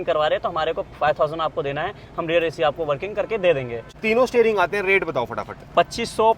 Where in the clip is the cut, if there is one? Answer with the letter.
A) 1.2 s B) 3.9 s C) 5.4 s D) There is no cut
B